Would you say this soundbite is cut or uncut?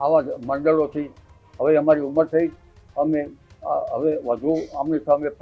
uncut